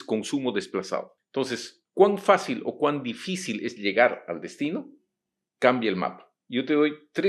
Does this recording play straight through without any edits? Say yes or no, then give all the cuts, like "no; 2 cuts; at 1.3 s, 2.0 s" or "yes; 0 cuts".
no; 1 cut; at 1.2 s